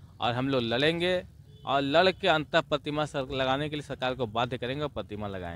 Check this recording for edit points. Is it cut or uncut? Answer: uncut